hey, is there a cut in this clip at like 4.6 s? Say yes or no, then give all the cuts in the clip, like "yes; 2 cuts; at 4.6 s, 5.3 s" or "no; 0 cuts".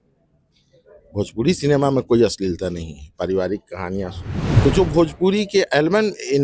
yes; 1 cut; at 4.6 s